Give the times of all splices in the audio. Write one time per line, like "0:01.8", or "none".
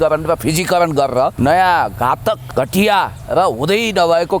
0:01.3
0:02.4